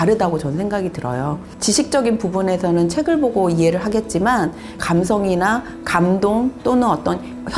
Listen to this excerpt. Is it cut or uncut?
uncut